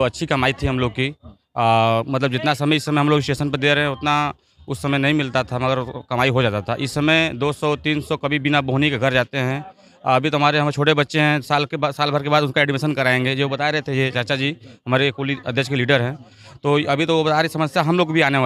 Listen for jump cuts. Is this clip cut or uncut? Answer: uncut